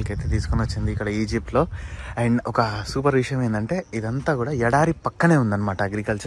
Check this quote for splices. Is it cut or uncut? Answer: uncut